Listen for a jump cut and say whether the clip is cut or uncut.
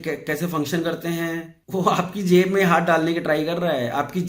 cut